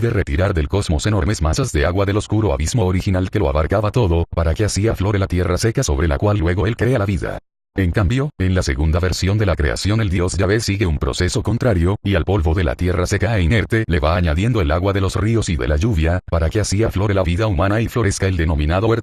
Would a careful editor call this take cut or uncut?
cut